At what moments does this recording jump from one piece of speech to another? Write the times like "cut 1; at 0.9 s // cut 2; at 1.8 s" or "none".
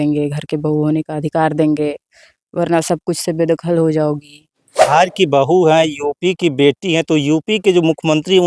cut 1; at 4.9 s